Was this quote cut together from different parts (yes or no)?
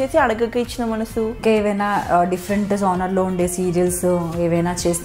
yes